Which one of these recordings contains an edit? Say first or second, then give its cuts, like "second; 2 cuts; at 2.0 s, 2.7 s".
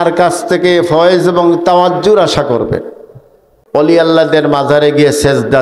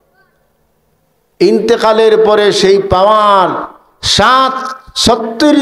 first; 1 cut; at 3.5 s